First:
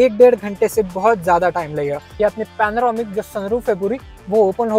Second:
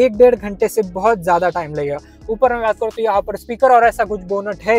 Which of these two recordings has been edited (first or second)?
first